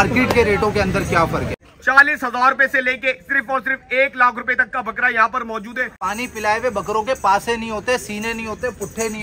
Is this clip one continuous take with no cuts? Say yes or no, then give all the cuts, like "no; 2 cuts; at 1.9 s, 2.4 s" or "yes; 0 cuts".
no; 2 cuts; at 1.5 s, 6.1 s